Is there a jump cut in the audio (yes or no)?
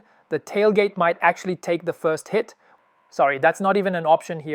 yes